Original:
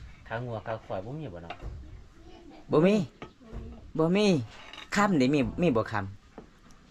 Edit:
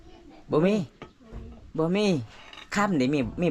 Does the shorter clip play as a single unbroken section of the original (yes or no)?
yes